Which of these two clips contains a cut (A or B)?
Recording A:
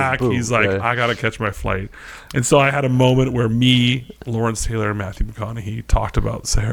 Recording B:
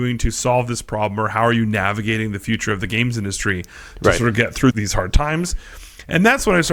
B